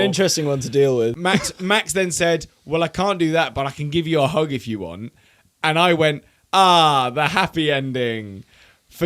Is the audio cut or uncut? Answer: cut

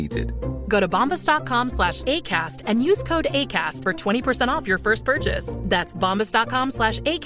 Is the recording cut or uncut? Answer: uncut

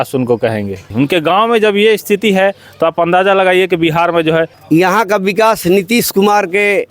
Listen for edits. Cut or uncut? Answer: cut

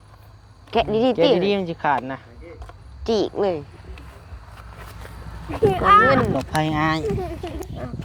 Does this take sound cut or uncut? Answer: cut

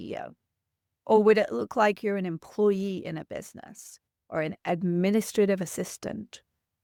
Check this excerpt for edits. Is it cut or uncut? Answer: uncut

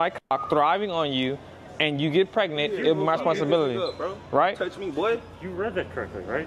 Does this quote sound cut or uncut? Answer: uncut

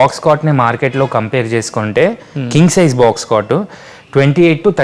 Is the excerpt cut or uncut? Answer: uncut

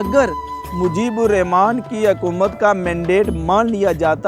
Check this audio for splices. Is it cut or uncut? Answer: uncut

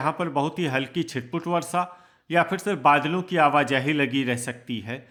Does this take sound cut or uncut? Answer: uncut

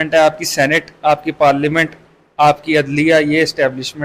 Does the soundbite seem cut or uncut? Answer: uncut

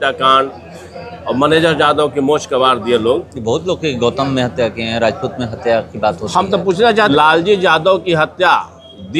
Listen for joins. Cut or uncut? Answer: cut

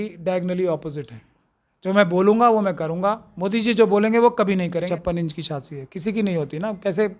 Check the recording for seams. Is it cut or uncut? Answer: cut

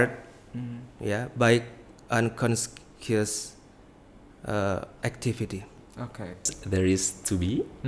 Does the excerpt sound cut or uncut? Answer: cut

